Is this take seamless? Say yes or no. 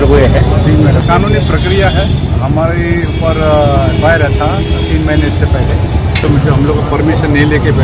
no